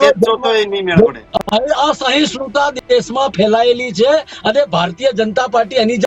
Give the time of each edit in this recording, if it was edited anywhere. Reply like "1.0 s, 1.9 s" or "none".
1.2 s